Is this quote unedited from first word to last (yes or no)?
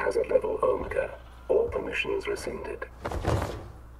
yes